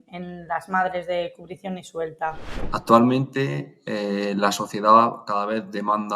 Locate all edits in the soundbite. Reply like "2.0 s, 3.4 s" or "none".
2.7 s